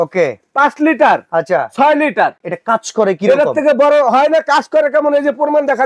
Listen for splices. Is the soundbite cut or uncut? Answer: uncut